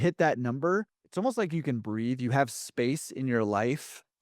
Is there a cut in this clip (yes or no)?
yes